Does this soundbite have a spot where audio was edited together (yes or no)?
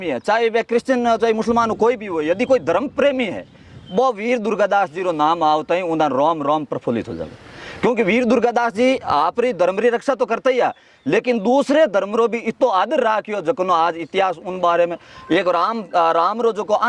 no